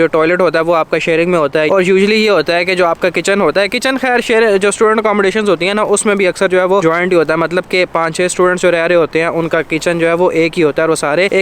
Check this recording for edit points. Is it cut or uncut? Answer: uncut